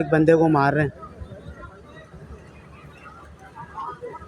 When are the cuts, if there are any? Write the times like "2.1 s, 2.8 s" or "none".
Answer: none

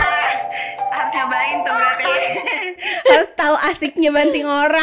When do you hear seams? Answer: none

